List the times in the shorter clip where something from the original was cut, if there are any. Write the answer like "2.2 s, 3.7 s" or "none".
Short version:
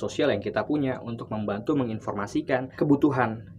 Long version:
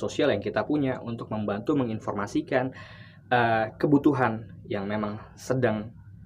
2.6 s